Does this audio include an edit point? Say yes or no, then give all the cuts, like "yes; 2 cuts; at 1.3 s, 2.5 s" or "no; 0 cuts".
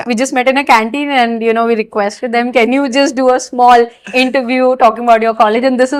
no; 0 cuts